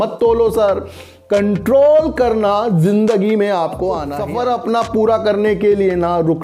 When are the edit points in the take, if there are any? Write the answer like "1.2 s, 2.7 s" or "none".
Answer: 4.1 s